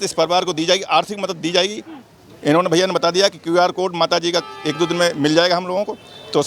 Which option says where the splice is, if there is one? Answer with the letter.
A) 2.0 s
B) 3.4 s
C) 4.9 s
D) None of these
D